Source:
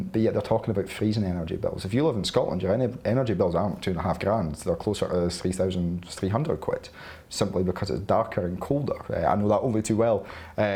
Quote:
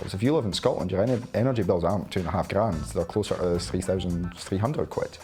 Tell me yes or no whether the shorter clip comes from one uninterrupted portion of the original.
yes